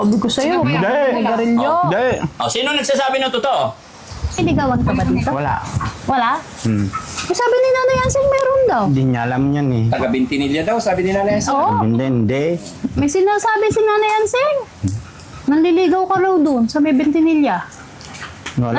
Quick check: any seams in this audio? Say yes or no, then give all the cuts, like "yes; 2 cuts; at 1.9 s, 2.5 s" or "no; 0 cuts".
yes; 1 cut; at 4.4 s